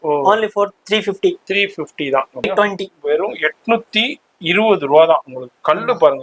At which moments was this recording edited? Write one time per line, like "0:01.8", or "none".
0:02.5